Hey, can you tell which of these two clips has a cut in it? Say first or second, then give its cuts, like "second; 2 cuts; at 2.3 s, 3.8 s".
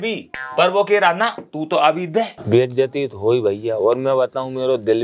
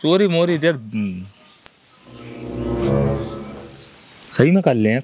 first; 1 cut; at 2.4 s